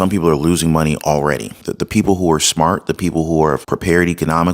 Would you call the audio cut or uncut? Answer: cut